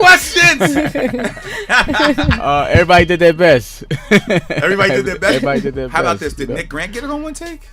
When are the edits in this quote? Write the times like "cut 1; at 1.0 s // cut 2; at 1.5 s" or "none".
none